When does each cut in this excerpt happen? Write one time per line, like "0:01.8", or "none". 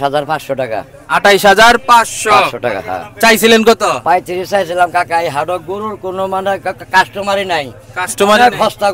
none